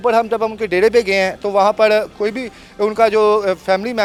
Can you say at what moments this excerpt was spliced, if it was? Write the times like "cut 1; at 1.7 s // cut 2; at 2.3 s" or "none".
none

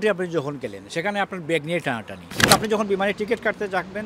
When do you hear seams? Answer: cut 1; at 2.5 s

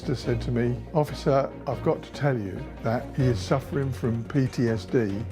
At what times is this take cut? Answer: cut 1; at 0.8 s // cut 2; at 1.6 s // cut 3; at 3.1 s

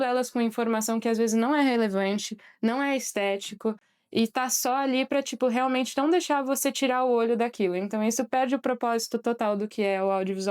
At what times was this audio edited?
none

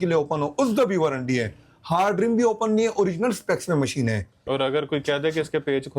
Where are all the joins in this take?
cut 1; at 4.5 s

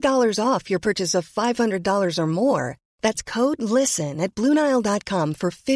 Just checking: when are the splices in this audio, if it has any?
none

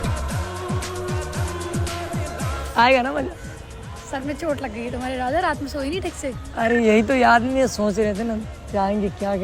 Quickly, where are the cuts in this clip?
none

